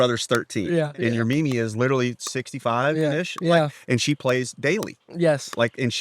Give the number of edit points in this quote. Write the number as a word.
one